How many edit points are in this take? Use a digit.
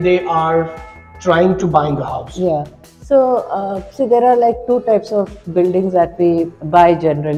0